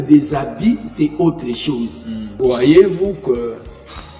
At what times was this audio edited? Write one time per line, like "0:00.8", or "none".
0:02.2